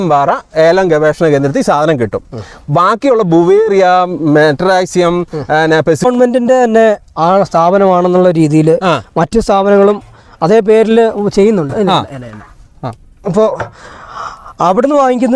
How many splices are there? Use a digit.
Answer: 1